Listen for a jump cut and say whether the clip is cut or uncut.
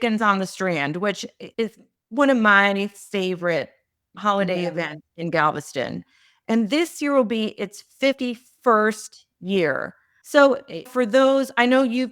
uncut